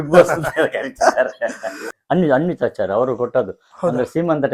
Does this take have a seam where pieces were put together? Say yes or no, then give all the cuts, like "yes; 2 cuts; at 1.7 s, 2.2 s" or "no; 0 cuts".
yes; 1 cut; at 1.9 s